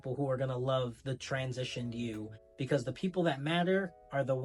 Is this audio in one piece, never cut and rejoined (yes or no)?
yes